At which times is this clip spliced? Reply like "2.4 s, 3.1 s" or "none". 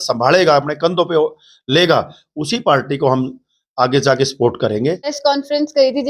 5.2 s